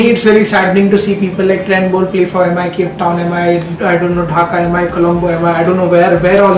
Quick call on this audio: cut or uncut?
uncut